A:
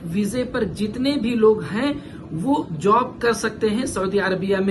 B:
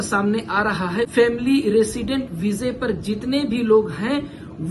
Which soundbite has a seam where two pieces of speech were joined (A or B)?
B